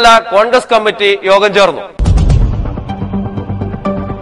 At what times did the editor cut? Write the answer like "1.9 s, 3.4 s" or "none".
1.9 s